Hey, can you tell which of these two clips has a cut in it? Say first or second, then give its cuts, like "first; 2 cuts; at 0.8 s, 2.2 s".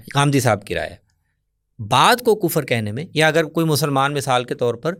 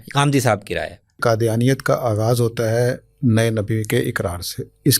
second; 1 cut; at 1.2 s